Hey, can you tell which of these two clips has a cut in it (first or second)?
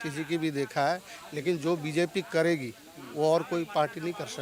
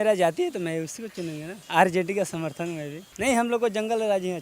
second